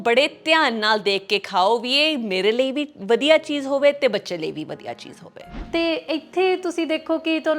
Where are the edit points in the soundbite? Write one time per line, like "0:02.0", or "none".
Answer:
0:05.0